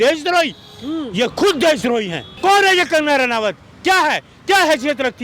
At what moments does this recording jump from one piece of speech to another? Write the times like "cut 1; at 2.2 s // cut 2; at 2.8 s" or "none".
cut 1; at 2.2 s